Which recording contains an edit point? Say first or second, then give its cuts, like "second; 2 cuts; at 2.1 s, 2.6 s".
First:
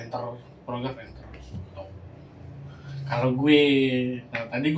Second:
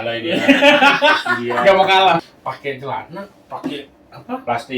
second; 1 cut; at 2.2 s